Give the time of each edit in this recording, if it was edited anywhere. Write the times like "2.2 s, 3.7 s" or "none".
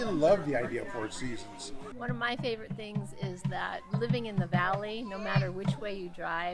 1.8 s